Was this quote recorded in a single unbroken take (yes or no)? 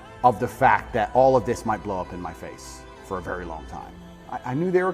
no